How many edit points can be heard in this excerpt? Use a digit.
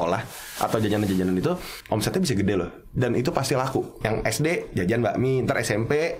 1